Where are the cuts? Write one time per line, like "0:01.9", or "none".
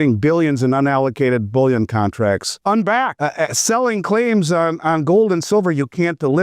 0:02.5
0:03.1

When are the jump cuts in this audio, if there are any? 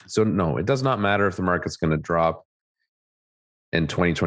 none

